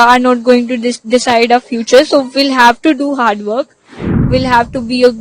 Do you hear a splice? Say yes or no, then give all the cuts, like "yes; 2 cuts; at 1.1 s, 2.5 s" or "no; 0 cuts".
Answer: yes; 1 cut; at 4.2 s